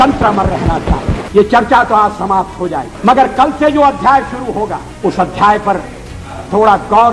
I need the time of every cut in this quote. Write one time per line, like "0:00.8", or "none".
0:01.2
0:02.9
0:04.9